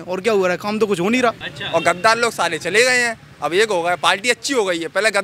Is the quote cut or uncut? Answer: cut